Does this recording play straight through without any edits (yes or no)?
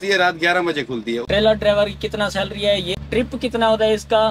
no